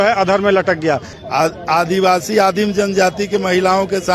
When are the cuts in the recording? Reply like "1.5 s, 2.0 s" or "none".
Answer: 1.1 s